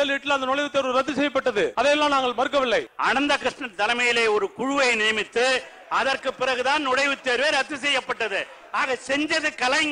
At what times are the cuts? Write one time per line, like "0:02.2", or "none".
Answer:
0:01.7
0:02.9